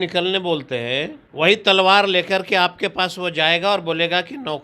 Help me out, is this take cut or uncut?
cut